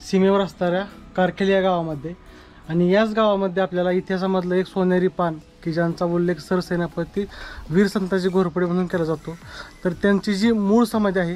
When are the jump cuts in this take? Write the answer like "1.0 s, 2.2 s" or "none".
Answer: none